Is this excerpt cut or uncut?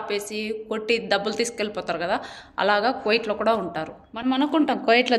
cut